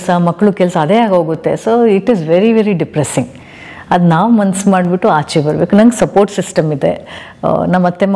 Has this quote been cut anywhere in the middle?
no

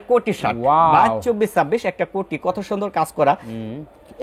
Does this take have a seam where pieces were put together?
no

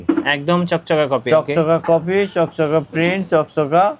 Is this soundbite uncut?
yes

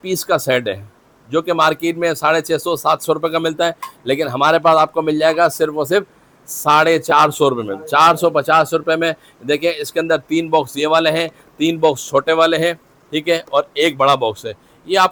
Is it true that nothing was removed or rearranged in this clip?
yes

